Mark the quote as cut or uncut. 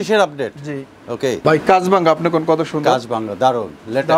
cut